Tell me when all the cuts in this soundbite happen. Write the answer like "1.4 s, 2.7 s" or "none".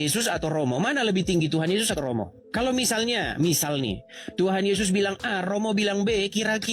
2.4 s